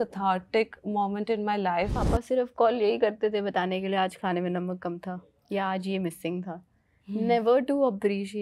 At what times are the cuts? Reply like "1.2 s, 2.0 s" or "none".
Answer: 1.9 s